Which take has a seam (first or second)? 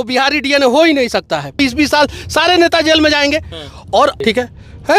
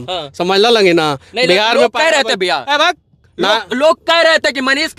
first